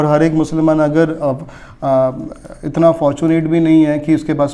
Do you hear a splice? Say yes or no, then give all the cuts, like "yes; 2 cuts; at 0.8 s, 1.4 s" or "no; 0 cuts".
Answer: no; 0 cuts